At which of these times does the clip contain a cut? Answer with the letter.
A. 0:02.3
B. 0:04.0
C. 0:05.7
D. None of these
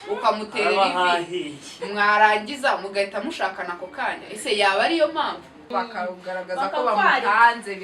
C